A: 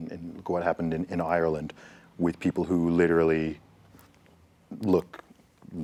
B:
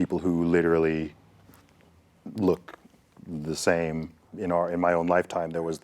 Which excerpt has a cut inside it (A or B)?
B